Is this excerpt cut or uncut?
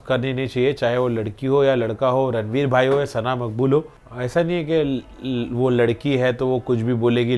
cut